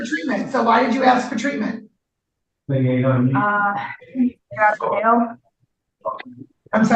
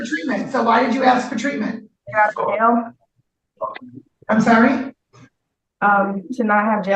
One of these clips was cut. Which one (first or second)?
second